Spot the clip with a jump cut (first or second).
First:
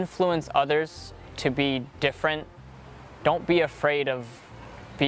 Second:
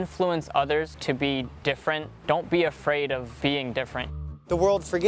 second